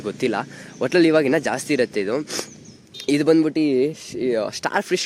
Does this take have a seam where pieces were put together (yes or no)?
no